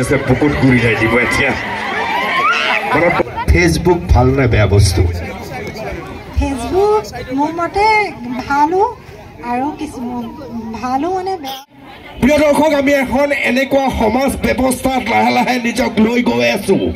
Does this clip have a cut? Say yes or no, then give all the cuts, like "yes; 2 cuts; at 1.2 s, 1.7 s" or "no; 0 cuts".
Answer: yes; 2 cuts; at 3.2 s, 11.5 s